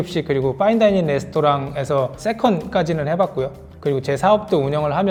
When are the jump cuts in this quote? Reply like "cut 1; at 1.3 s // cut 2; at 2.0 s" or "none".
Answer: none